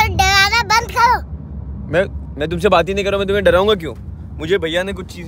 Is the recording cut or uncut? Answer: uncut